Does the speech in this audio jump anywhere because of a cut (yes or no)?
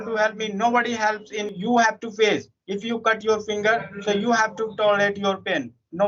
yes